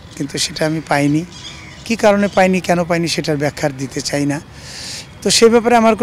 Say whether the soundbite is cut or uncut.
uncut